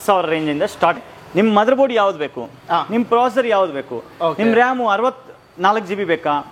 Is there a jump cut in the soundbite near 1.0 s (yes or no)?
yes